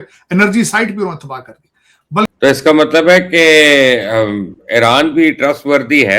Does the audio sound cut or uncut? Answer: cut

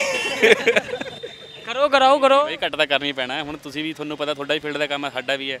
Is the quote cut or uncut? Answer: uncut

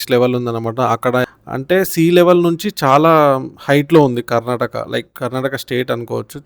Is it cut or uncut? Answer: cut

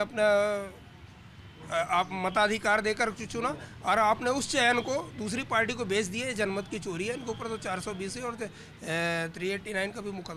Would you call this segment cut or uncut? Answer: uncut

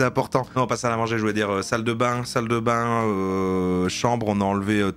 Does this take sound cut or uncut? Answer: uncut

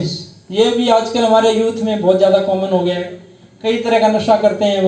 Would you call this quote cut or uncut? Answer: uncut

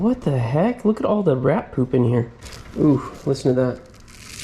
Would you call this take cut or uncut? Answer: cut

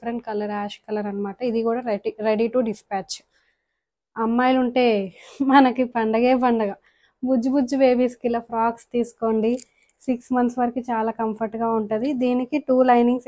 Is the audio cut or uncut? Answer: uncut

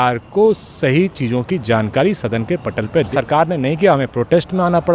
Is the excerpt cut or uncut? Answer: cut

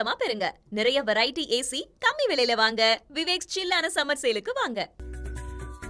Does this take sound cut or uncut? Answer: cut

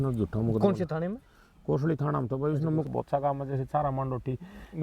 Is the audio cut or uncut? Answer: cut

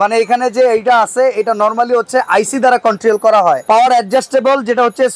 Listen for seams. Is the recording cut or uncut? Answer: uncut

